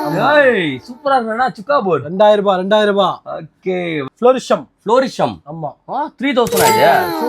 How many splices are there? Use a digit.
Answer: 1